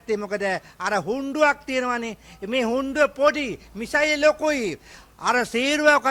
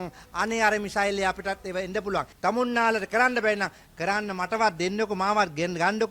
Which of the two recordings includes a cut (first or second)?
second